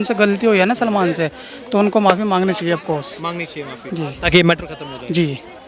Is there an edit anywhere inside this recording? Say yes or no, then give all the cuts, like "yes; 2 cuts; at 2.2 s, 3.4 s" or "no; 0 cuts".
no; 0 cuts